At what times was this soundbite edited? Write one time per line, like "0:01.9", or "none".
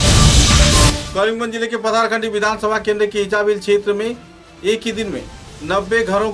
0:01.0